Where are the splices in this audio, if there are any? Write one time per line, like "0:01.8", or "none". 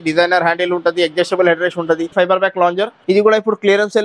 0:02.1
0:03.0